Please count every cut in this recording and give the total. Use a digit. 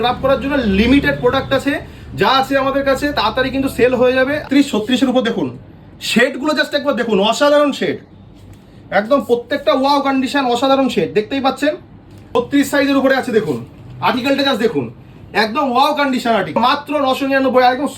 3